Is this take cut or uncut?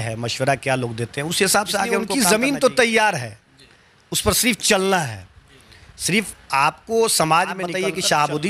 cut